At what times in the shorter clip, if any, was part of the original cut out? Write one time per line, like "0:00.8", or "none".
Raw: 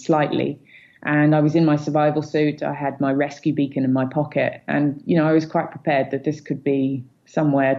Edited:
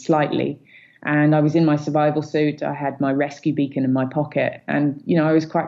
none